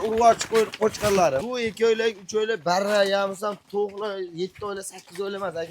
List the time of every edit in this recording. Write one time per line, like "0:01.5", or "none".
0:01.5